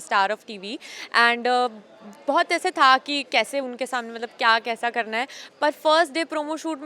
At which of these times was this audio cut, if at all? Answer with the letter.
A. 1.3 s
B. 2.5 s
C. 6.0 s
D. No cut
D